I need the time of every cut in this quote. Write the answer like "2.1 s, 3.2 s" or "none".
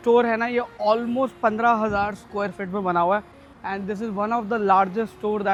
none